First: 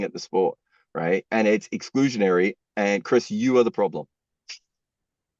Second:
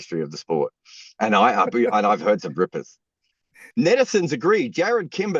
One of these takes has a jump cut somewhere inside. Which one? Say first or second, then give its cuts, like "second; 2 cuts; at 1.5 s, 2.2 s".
second; 1 cut; at 3.6 s